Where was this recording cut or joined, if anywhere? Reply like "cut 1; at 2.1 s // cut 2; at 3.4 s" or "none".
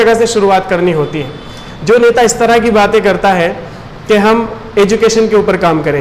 none

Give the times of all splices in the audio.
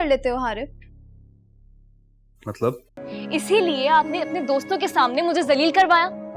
cut 1; at 2.9 s

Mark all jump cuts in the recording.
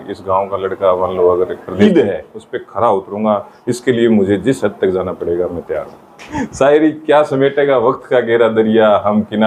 cut 1; at 1.8 s // cut 2; at 6.2 s

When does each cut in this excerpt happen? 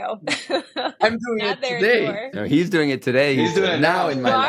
cut 1; at 0.9 s // cut 2; at 2.4 s

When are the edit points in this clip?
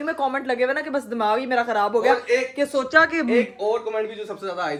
none

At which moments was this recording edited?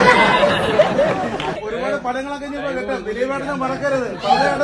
cut 1; at 1.6 s

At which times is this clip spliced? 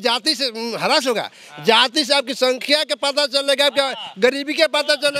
none

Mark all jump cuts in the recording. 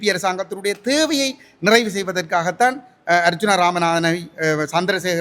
none

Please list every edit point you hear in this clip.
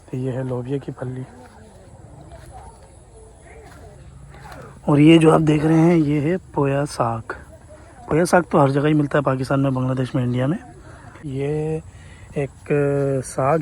cut 1; at 11.3 s

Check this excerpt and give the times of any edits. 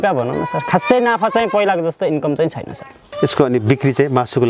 cut 1; at 3.0 s

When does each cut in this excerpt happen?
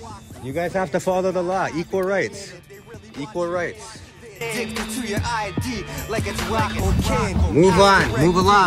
none

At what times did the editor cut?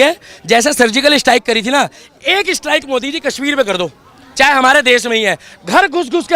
none

